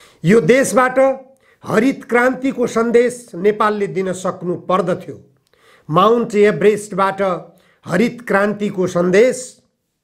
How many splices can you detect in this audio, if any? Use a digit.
0